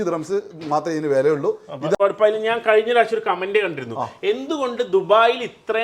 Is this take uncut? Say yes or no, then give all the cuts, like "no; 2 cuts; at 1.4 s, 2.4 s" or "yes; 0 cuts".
no; 1 cut; at 2.0 s